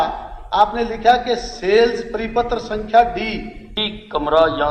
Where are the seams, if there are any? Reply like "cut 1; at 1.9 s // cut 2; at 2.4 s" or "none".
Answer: cut 1; at 3.7 s